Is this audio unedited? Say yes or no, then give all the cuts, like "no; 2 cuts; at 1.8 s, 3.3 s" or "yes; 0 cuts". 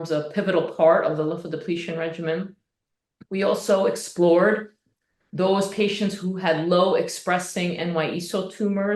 yes; 0 cuts